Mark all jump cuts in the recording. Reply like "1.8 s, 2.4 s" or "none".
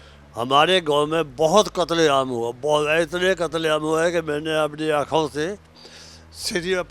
none